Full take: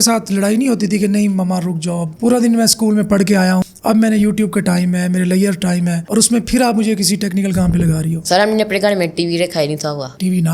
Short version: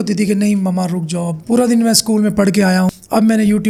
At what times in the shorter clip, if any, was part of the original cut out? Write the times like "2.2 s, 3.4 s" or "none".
none